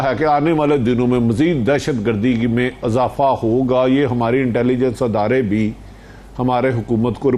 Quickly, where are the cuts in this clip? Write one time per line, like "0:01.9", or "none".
none